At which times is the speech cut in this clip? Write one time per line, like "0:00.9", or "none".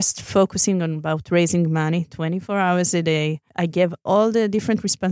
0:03.4